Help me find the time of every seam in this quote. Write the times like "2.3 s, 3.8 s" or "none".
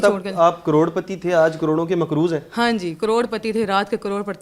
none

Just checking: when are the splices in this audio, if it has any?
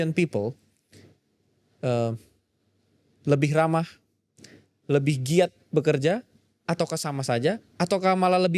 none

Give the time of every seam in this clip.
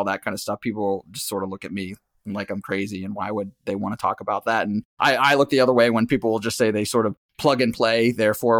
none

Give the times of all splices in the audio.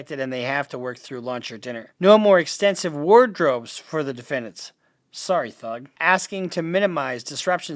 1.9 s, 5.9 s

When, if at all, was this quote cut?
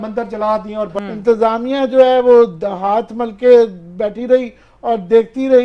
0.9 s

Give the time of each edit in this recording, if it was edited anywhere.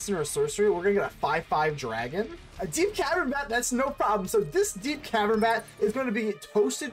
2.4 s

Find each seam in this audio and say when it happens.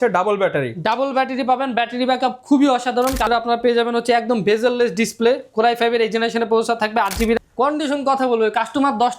3.3 s, 7.4 s

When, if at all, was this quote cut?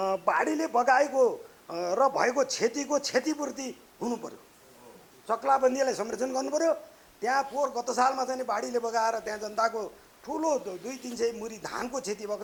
none

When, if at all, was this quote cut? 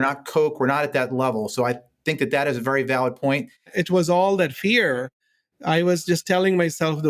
3.7 s

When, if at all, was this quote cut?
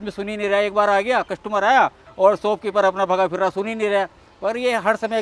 none

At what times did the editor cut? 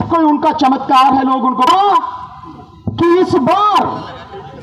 1.7 s

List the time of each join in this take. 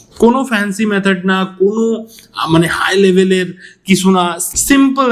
none

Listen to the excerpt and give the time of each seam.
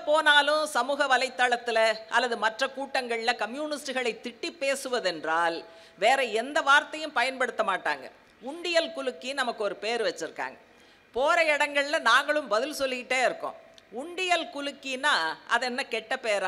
none

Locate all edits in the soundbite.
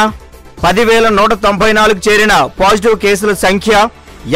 none

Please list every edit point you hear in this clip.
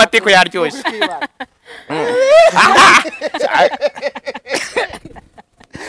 none

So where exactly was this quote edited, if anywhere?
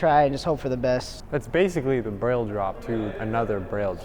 1.1 s, 2.9 s

